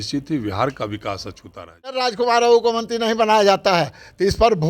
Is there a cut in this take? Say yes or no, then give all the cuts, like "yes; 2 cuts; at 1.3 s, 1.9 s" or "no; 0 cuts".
yes; 1 cut; at 2.0 s